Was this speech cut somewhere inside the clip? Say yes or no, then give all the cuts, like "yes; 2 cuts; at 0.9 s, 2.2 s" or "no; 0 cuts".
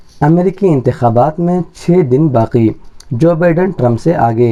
no; 0 cuts